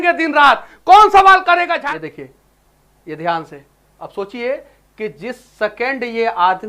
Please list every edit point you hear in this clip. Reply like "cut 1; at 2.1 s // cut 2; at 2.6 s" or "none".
cut 1; at 1.6 s